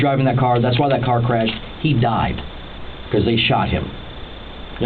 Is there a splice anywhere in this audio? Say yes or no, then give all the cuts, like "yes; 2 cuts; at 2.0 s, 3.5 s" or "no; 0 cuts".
no; 0 cuts